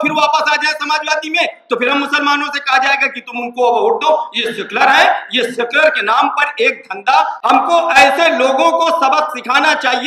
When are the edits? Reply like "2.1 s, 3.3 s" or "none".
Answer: 7.4 s